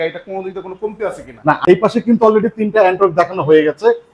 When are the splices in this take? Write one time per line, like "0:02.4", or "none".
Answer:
0:01.6